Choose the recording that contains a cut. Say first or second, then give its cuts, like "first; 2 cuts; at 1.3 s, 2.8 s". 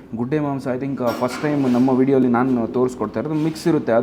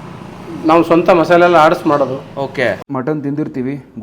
second; 1 cut; at 2.8 s